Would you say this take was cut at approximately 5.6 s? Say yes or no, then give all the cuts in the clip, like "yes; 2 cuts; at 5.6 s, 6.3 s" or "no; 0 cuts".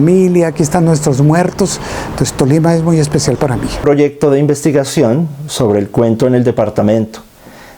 no; 1 cut; at 3.8 s